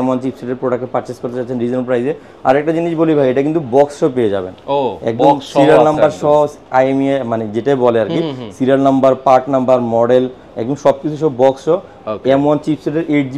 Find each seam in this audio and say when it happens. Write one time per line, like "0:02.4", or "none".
none